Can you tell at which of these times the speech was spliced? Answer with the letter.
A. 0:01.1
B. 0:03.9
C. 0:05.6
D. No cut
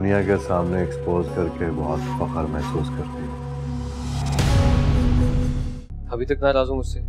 C